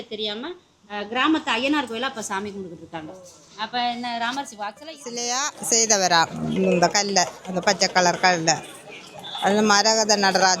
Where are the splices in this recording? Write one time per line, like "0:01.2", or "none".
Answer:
0:05.1